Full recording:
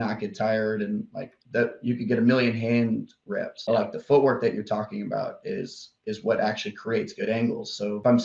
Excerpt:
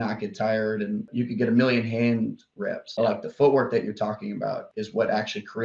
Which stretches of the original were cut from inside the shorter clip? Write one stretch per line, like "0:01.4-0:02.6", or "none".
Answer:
0:01.1-0:01.8
0:05.4-0:06.0